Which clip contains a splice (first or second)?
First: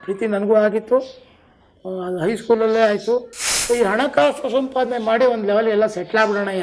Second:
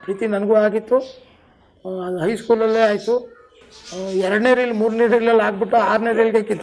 first